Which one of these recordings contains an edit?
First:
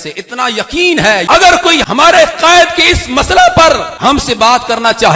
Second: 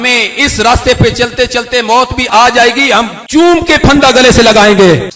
first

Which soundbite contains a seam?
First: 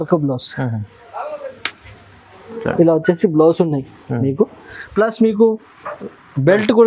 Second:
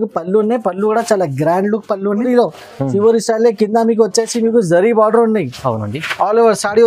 second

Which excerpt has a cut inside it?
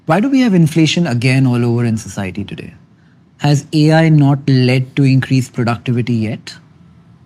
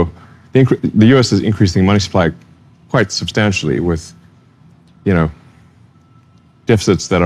second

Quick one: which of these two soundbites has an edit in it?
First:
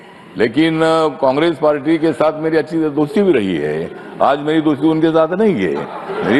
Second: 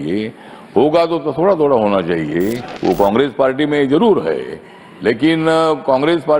second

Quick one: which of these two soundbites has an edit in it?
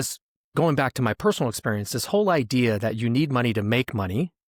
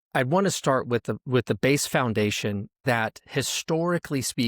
second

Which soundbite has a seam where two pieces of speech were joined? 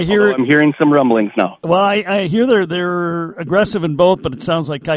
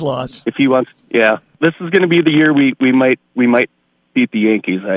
second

